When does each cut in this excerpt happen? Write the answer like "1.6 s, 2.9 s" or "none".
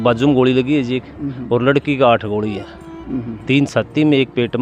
none